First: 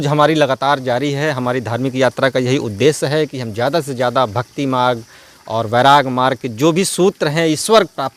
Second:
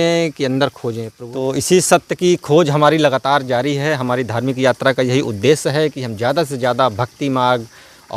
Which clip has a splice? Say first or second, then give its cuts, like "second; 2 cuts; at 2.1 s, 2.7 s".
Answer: second; 1 cut; at 1.1 s